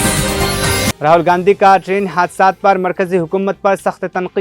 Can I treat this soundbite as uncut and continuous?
no; 1 cut; at 0.9 s

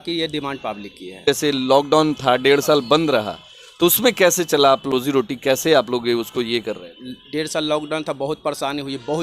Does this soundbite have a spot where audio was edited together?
yes; 2 cuts; at 1.2 s, 5.0 s

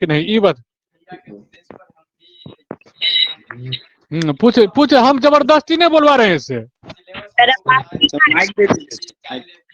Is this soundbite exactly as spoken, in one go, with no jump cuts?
yes; 0 cuts

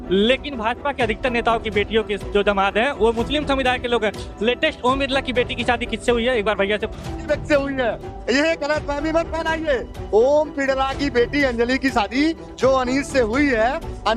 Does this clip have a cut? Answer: no; 0 cuts

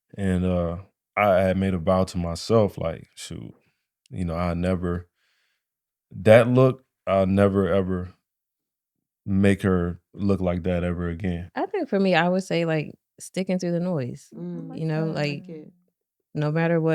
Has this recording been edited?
yes; 1 cut; at 11.4 s

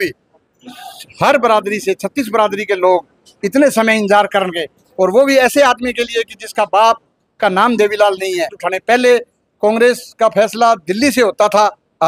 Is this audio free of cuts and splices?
no; 1 cut; at 8.7 s

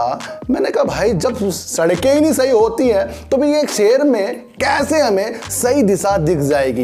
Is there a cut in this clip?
no; 0 cuts

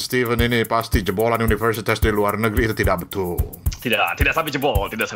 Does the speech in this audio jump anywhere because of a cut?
no; 0 cuts

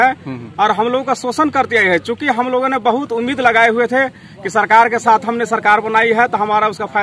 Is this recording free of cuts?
yes; 0 cuts

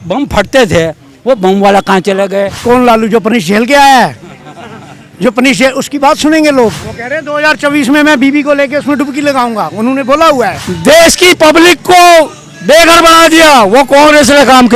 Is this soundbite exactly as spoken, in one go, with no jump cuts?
no; 3 cuts; at 2.6 s, 6.9 s, 10.7 s

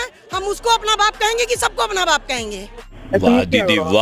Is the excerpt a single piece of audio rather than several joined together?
yes; 0 cuts

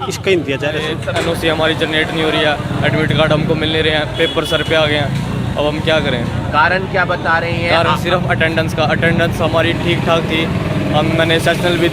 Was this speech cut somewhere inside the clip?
yes; 1 cut; at 1.0 s

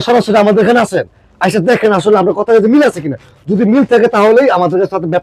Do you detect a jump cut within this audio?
no; 0 cuts

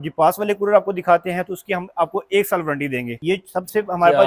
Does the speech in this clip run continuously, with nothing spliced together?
no; 1 cut; at 3.1 s

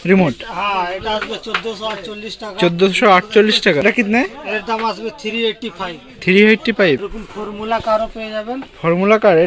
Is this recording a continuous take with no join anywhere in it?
no; 2 cuts; at 3.8 s, 7.0 s

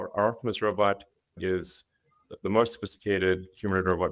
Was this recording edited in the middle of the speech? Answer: no; 0 cuts

